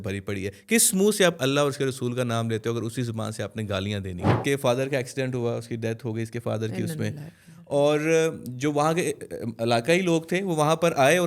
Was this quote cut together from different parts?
yes; 1 cut; at 4.4 s

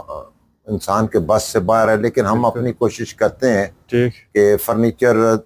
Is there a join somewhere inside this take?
no; 0 cuts

